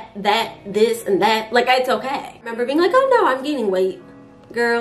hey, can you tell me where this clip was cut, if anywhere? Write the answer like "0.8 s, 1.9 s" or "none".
2.5 s